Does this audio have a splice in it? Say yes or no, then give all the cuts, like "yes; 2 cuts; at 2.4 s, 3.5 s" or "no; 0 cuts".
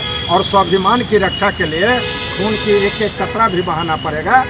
no; 0 cuts